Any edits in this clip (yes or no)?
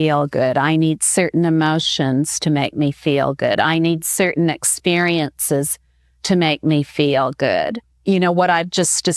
yes